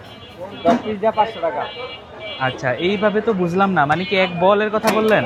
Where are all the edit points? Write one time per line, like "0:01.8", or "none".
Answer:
none

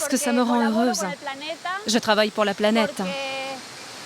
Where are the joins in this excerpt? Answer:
0:03.1

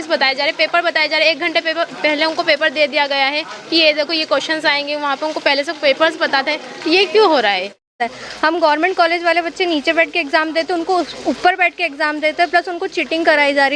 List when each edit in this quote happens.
0:08.0

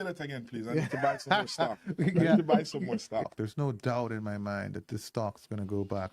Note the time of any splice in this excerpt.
0:03.2

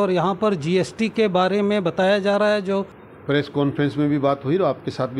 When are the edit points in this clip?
0:03.0

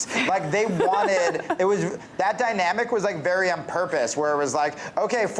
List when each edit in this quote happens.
0:02.0

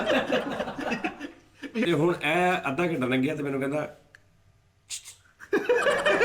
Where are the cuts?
0:01.8

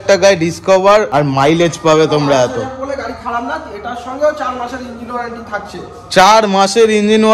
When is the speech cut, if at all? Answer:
0:01.1

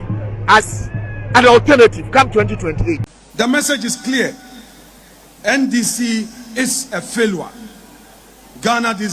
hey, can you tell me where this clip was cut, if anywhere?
0:03.0

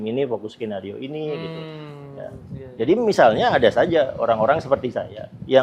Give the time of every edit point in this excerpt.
none

